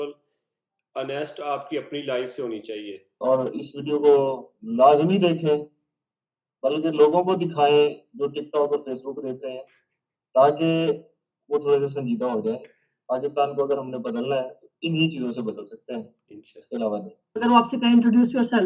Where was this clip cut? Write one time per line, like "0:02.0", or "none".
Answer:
0:03.1
0:17.3